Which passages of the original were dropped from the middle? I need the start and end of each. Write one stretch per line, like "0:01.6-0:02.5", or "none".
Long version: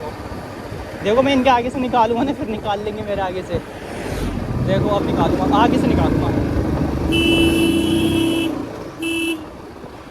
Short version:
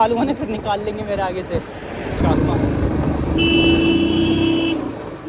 0:04.2-0:05.9